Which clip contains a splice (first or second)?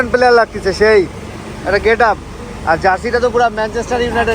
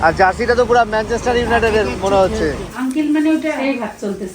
second